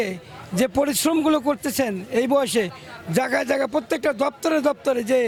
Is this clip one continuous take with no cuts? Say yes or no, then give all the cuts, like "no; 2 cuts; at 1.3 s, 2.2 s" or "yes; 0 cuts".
yes; 0 cuts